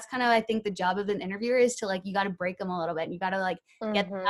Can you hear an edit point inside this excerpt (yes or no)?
no